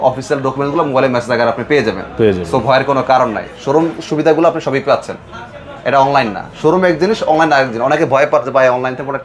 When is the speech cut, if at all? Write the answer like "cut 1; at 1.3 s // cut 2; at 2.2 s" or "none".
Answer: none